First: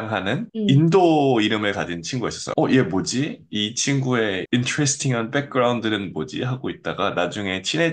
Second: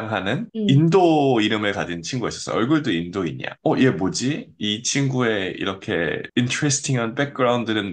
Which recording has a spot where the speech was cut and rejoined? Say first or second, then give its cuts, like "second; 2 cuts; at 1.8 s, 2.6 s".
first; 2 cuts; at 2.4 s, 4.4 s